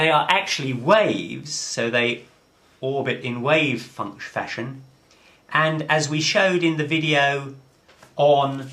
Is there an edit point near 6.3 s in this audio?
yes; 1 cut; at 6.3 s

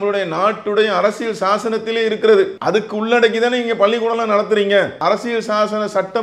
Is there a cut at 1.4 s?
no; 2 cuts; at 2.6 s, 5.0 s

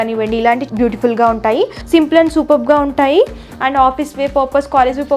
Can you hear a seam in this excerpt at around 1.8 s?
yes; 1 cut; at 1.8 s

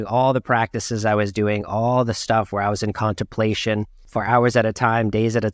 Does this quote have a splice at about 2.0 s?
no; 1 cut; at 4.0 s

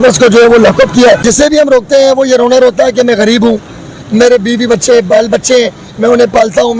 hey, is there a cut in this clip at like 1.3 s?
yes; 1 cut; at 1.3 s

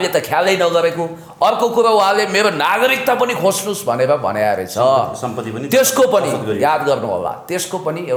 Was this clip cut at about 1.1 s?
no; 0 cuts

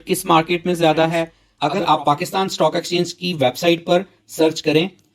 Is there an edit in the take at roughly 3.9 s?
no; 1 cut; at 1.4 s

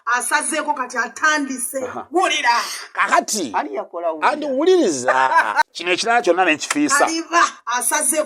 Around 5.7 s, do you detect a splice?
yes; 1 cut; at 5.7 s

